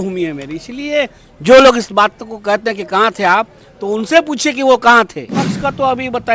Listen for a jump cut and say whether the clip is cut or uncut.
cut